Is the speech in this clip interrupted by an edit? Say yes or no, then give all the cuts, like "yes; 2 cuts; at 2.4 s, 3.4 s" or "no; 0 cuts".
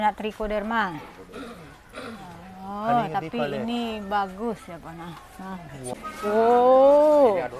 yes; 1 cut; at 5.8 s